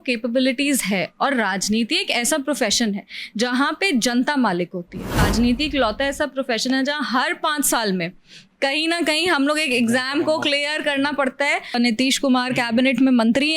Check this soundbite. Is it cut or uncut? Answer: cut